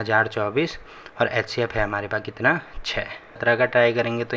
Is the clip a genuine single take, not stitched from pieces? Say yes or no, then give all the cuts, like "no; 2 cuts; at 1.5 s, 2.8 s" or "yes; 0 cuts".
no; 1 cut; at 3.4 s